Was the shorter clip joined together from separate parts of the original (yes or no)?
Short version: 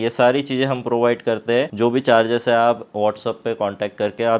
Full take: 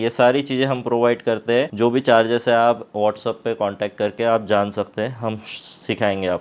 no